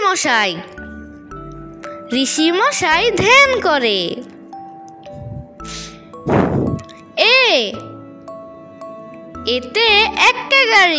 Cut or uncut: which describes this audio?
cut